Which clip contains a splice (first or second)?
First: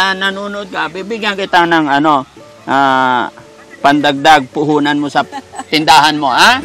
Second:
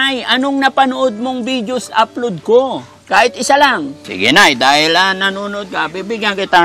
second